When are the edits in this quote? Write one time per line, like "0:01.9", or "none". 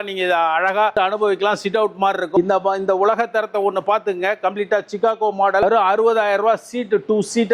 none